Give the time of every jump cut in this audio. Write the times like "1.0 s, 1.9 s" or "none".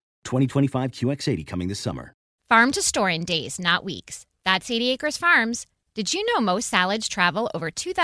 2.3 s